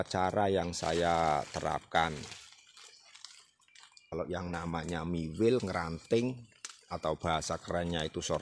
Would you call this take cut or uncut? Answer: cut